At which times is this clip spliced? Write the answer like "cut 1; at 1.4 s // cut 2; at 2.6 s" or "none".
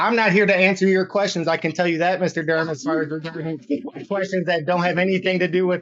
none

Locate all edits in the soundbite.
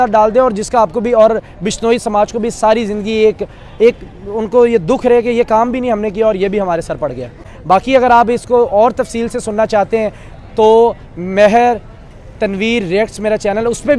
cut 1; at 7.4 s

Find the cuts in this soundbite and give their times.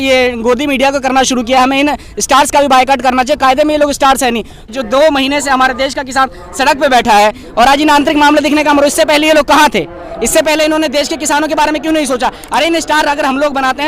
cut 1; at 4.7 s

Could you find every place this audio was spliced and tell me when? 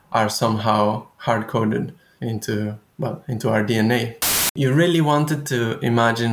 cut 1; at 4.4 s

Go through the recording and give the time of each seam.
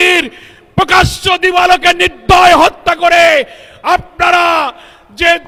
none

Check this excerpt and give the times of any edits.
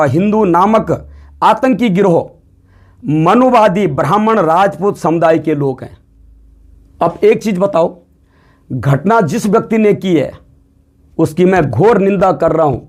none

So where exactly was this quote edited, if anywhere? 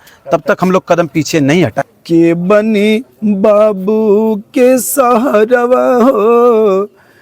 cut 1; at 1.9 s

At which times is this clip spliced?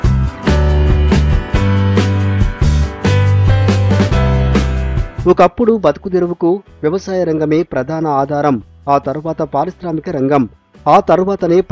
cut 1; at 5.0 s

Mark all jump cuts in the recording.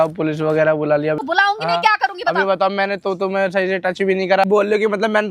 cut 1; at 1.2 s // cut 2; at 4.4 s

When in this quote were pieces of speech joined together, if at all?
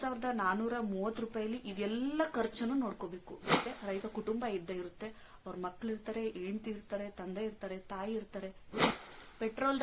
cut 1; at 3.7 s // cut 2; at 8.9 s

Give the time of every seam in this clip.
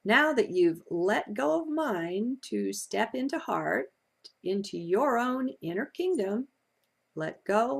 none

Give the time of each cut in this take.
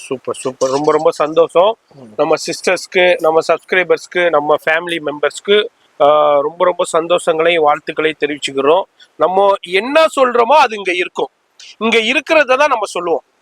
none

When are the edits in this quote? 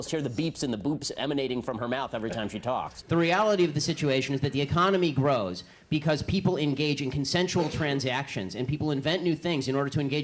cut 1; at 3.8 s

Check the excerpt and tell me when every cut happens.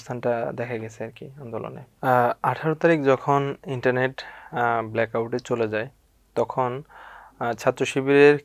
cut 1; at 1.8 s

